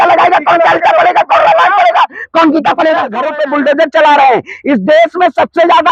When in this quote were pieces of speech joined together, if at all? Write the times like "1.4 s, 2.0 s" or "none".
3.3 s